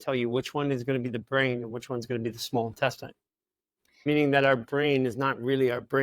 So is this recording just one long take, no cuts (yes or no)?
no